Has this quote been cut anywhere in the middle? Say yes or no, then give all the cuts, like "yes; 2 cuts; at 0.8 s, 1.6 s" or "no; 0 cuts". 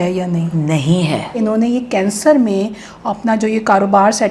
yes; 1 cut; at 1.4 s